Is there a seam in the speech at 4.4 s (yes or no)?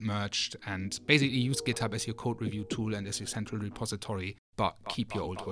yes